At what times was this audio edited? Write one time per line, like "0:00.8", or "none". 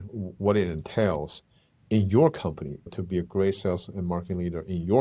0:02.8